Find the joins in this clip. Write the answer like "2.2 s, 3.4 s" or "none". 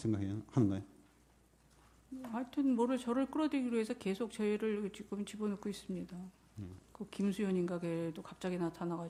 none